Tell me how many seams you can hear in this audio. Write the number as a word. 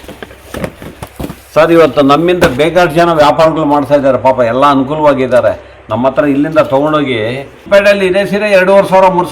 one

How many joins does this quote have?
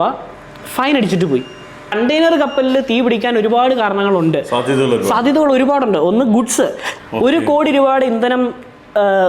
two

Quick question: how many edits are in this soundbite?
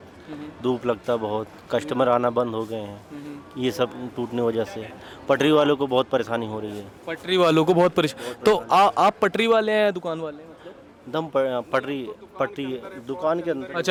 zero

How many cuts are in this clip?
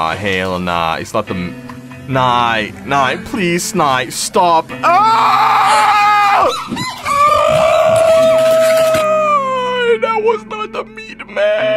zero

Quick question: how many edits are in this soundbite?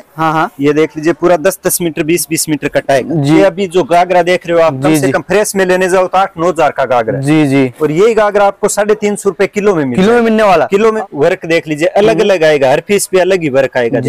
two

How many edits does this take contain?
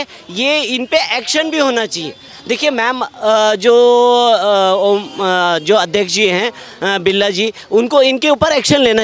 zero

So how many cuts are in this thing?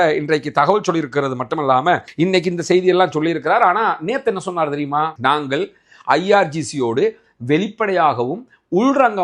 one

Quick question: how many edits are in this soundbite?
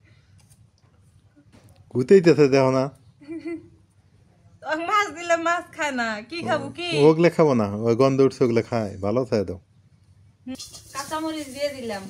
one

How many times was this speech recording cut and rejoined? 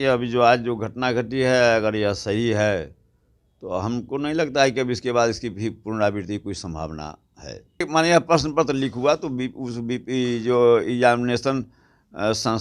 one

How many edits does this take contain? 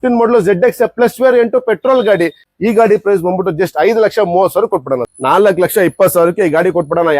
two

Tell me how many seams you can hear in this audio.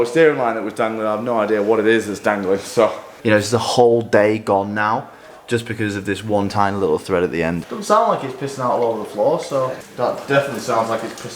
three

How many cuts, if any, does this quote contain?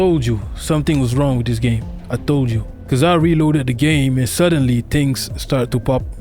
one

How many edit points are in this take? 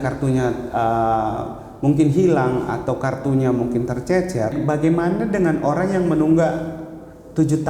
one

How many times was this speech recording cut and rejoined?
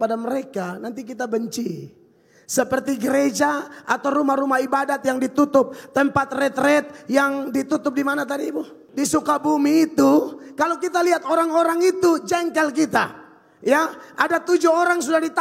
one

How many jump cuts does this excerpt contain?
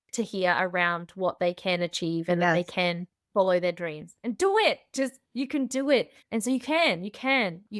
one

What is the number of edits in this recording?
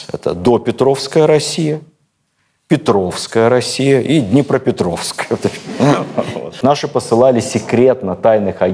one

